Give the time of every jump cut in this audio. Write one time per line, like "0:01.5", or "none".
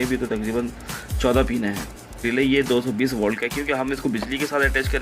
0:02.2